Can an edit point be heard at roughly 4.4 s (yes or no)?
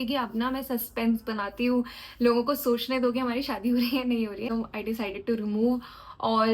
yes